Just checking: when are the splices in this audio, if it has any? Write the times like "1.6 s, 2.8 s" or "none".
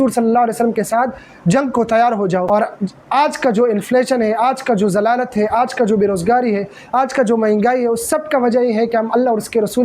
2.5 s